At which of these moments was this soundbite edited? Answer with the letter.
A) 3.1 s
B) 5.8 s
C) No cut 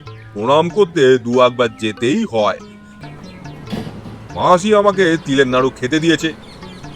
A